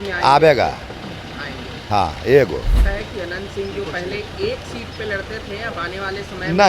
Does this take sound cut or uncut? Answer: cut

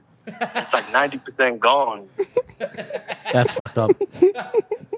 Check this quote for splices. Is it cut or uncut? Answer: uncut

